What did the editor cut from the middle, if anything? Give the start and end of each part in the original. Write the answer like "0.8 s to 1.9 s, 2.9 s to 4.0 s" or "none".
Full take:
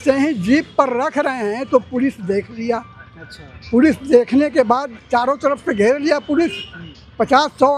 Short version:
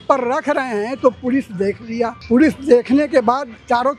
2.9 s to 3.6 s